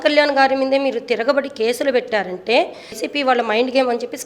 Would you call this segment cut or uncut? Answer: cut